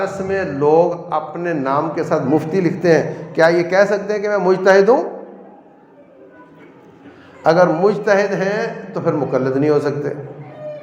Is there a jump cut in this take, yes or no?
no